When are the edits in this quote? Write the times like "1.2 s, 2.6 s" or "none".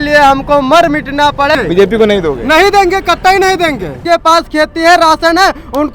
1.6 s, 4.0 s